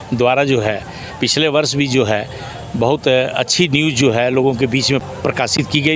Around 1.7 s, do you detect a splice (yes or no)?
no